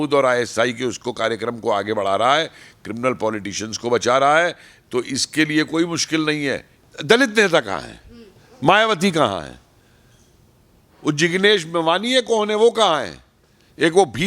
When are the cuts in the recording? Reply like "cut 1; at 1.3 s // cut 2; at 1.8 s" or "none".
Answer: cut 1; at 6.7 s